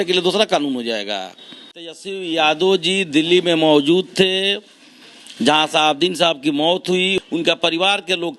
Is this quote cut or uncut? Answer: cut